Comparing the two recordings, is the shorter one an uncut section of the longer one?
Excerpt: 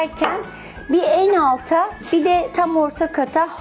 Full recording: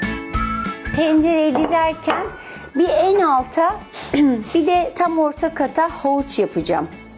no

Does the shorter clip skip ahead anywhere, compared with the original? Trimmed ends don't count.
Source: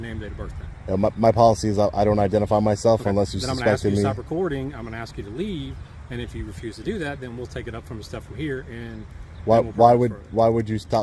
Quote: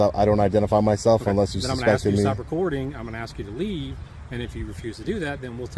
no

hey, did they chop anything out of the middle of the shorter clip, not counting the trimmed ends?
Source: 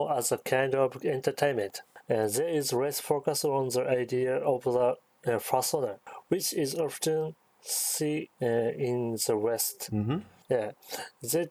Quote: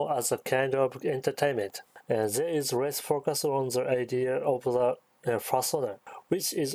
no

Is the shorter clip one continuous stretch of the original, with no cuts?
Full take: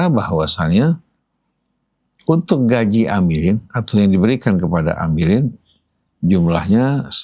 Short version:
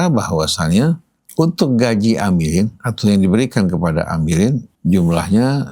no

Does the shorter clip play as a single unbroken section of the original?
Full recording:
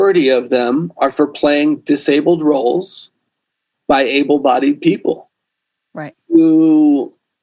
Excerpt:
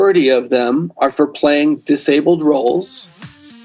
yes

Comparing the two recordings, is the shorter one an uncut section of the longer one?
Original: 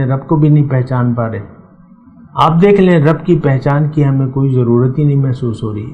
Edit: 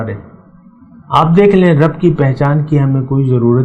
yes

